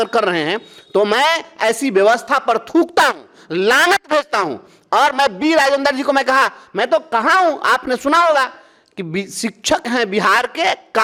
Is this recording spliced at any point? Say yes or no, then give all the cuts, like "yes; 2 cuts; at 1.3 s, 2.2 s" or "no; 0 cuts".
no; 0 cuts